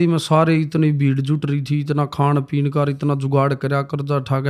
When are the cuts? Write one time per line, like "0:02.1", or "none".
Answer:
none